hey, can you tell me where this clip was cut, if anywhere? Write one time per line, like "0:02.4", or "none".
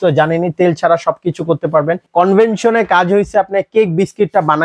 0:02.0